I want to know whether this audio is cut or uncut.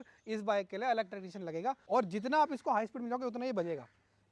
cut